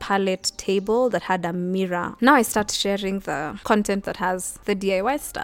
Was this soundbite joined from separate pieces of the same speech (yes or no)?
yes